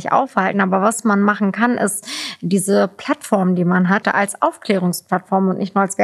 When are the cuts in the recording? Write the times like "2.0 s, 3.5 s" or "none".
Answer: 4.0 s